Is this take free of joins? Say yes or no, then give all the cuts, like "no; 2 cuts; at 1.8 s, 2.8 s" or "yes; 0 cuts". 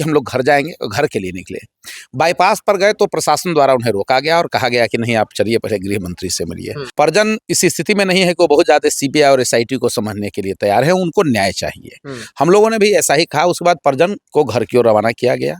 no; 1 cut; at 6.8 s